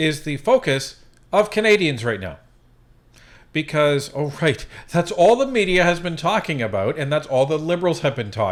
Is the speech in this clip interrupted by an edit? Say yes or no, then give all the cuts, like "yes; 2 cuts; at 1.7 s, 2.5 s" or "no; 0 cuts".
no; 0 cuts